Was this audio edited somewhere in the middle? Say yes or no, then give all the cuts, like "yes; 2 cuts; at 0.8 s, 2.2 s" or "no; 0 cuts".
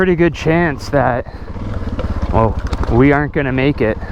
no; 0 cuts